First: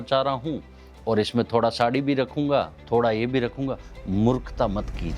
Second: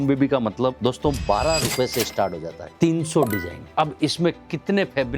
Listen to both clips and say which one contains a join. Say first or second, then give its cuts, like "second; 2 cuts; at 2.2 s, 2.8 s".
second; 3 cuts; at 0.8 s, 2.6 s, 3.6 s